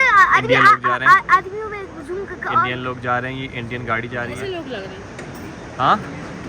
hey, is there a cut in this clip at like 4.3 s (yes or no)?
yes